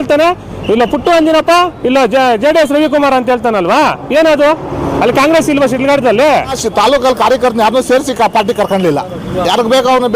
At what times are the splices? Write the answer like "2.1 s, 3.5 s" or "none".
6.6 s